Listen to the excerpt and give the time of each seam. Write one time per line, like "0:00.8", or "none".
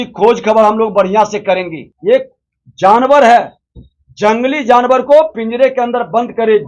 0:01.8